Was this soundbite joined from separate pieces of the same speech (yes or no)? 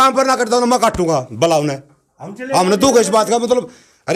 no